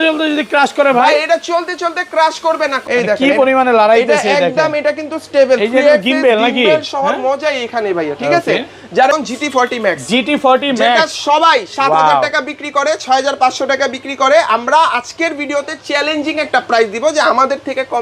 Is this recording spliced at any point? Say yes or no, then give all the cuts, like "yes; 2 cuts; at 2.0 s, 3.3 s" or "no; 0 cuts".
yes; 2 cuts; at 2.8 s, 9.1 s